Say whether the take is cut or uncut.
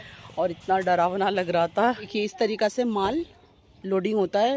cut